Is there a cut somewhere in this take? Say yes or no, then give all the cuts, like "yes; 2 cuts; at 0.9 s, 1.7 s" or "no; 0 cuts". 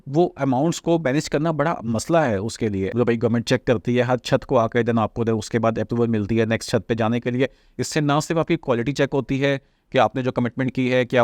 yes; 1 cut; at 2.9 s